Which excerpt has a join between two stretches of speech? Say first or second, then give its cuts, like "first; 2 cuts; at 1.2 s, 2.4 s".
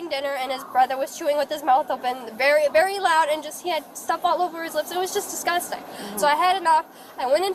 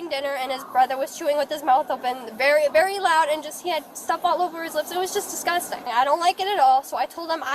second; 1 cut; at 5.9 s